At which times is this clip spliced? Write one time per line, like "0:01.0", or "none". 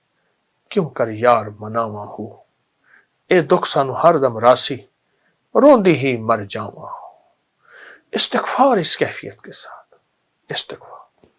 none